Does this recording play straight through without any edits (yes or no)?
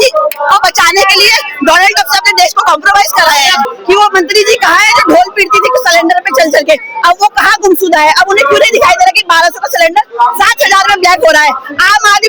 no